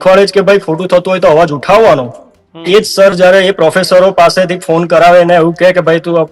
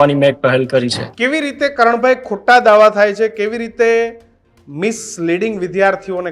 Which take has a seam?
second; 1 cut; at 1.0 s

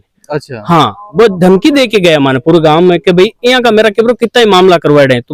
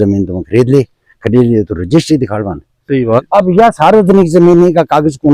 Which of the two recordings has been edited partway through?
second; 1 cut; at 3.2 s

